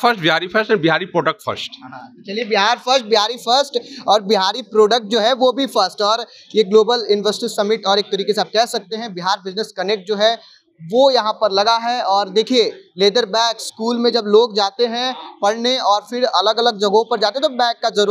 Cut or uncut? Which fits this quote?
uncut